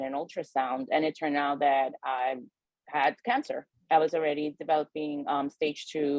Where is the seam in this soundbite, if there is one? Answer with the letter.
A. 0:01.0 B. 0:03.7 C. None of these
B